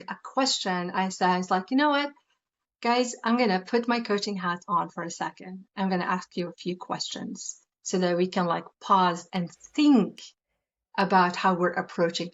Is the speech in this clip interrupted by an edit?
no; 0 cuts

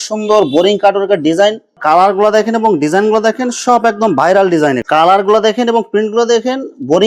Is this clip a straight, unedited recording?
no; 2 cuts; at 1.7 s, 4.8 s

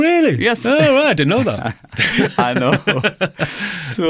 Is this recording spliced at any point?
no; 0 cuts

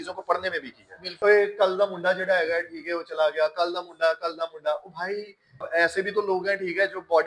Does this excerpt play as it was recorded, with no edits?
no; 2 cuts; at 1.1 s, 5.7 s

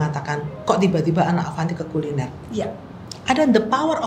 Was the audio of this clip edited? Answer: no; 0 cuts

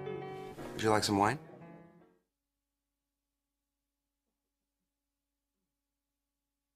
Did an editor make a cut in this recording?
no; 0 cuts

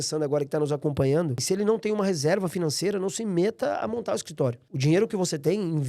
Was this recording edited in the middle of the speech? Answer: yes; 2 cuts; at 1.4 s, 4.7 s

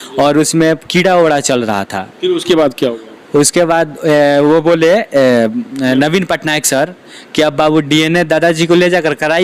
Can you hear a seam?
no; 0 cuts

